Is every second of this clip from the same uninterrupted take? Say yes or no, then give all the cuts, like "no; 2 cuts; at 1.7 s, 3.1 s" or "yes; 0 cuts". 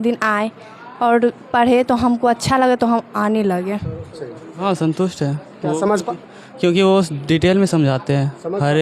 no; 1 cut; at 4.5 s